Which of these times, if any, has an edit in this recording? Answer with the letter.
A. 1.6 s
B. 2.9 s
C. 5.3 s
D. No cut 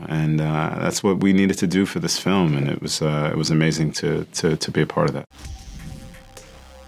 C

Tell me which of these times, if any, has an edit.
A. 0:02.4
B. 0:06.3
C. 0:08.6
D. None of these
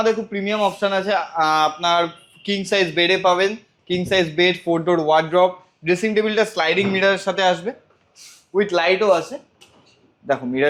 D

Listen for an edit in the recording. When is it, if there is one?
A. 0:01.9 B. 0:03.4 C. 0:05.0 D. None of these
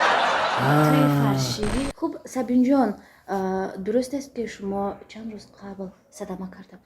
A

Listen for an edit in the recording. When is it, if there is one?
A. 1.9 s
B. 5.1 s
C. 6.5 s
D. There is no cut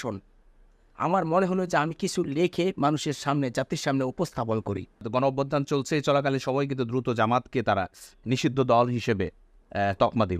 B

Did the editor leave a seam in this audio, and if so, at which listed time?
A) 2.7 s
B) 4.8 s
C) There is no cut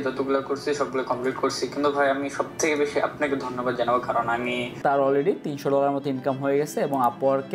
B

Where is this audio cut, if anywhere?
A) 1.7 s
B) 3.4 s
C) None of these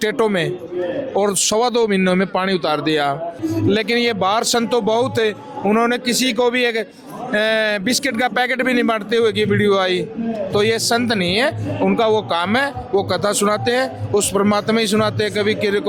B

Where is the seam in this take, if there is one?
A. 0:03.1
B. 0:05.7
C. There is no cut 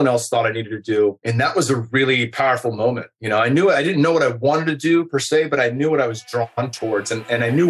C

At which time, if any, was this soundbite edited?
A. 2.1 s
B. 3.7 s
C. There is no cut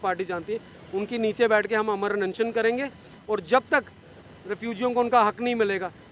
C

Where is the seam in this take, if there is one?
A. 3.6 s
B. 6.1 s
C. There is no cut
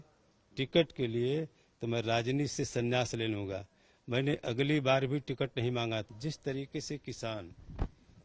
B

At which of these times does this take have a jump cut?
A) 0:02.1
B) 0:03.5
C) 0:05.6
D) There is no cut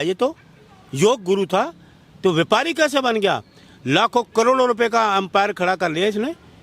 D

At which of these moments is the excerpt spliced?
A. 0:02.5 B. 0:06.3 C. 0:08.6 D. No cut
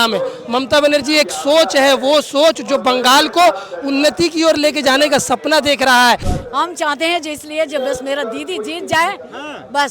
B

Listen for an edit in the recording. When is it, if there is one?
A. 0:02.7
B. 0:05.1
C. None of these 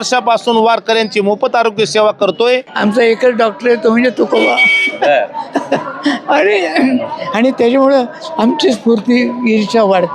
A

